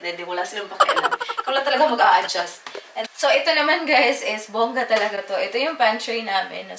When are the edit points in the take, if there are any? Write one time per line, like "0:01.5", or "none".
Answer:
none